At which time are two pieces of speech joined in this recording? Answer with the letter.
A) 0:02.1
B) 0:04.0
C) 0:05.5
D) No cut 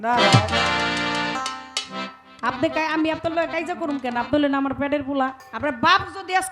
C